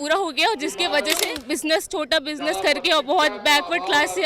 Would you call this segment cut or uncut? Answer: cut